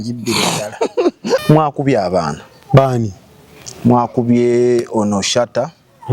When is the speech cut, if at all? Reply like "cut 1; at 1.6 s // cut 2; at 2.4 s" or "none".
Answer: cut 1; at 1.4 s